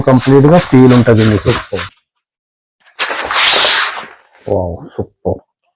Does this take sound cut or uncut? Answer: cut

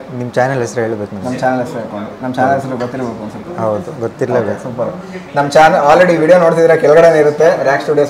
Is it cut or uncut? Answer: uncut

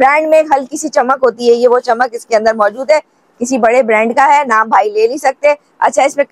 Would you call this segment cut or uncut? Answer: uncut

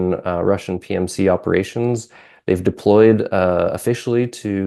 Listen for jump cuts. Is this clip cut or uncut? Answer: uncut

